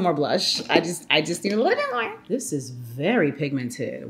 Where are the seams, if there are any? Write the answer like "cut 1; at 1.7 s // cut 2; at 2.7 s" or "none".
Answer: cut 1; at 2.1 s